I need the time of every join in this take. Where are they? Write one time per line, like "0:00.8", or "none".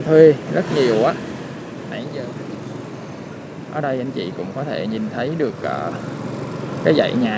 0:01.8